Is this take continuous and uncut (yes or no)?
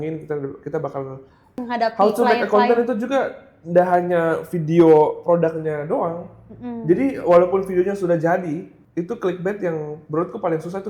no